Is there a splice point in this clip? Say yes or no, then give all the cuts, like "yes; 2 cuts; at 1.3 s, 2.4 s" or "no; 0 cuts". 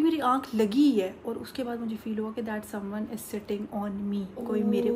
no; 0 cuts